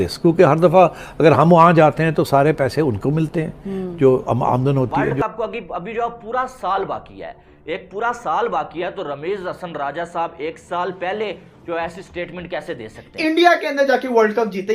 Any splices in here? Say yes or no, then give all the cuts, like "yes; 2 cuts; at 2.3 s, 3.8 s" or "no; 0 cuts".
yes; 2 cuts; at 5.0 s, 13.0 s